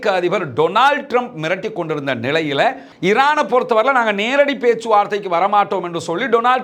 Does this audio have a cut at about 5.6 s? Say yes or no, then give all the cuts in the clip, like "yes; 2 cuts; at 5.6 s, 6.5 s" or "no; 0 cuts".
no; 1 cut; at 2.9 s